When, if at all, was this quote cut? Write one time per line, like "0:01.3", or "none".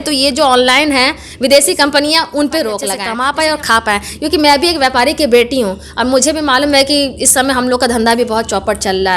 0:03.0